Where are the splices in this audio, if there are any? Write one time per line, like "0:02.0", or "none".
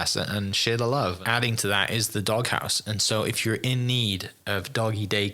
0:01.2